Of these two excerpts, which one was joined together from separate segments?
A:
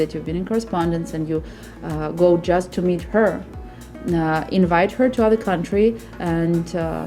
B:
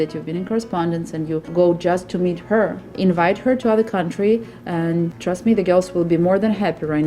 B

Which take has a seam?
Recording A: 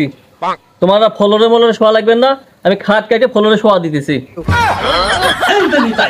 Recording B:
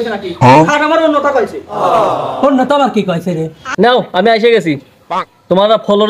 B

